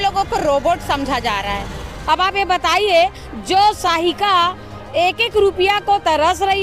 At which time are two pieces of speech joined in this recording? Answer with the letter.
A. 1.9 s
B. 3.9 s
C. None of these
A